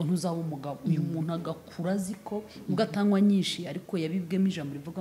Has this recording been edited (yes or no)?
no